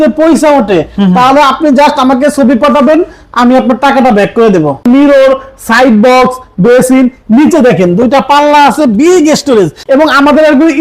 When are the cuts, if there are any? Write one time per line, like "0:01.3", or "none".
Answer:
0:04.8
0:09.8

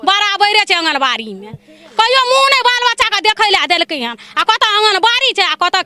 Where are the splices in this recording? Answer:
none

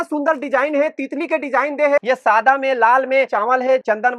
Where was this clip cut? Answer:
0:02.0

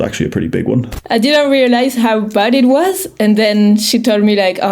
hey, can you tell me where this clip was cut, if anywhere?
0:00.9

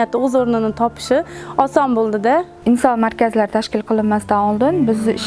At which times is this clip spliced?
0:02.3

